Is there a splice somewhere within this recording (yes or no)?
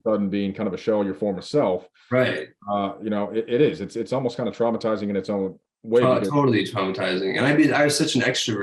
no